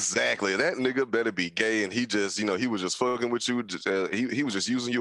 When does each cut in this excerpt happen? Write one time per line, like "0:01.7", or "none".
none